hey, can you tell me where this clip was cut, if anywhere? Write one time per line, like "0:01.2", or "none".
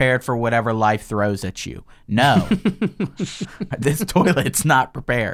none